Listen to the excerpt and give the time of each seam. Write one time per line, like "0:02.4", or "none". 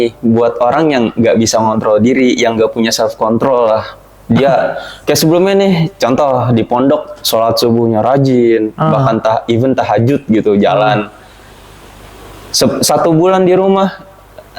none